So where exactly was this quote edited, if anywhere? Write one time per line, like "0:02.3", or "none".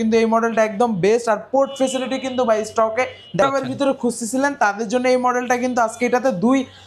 0:03.4